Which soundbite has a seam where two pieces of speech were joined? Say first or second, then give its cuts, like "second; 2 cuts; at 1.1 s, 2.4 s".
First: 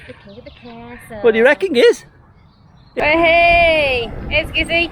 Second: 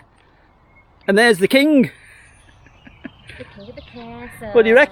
first; 1 cut; at 2.8 s